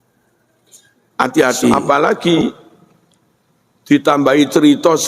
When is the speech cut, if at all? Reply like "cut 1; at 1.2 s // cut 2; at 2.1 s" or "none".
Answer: cut 1; at 1.7 s

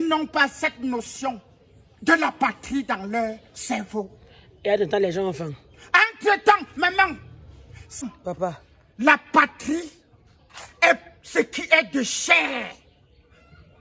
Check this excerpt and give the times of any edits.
cut 1; at 8.1 s

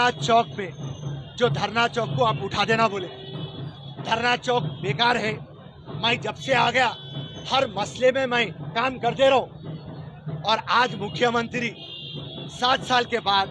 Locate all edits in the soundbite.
none

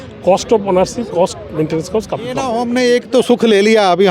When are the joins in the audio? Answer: cut 1; at 2.5 s

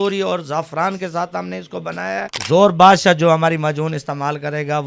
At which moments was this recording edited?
cut 1; at 2.3 s

